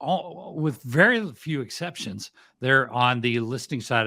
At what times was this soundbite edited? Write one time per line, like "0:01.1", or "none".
none